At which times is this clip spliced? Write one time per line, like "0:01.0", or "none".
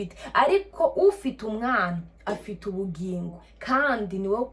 0:03.5